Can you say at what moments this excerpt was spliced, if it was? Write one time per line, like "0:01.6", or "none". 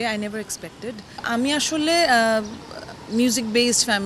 0:01.2